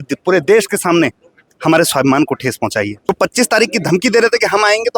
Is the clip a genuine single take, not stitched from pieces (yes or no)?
no